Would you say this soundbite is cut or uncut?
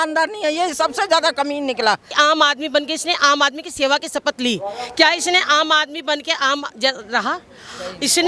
cut